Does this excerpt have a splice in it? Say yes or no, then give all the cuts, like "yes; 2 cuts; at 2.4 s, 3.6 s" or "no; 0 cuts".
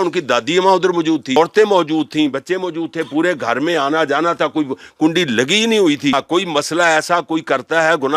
yes; 2 cuts; at 1.4 s, 6.1 s